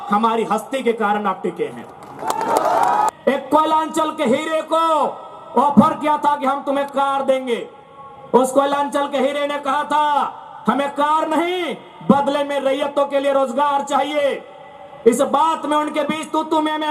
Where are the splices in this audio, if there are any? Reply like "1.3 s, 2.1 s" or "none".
3.1 s